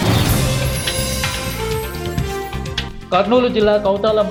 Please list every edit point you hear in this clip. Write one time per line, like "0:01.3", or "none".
none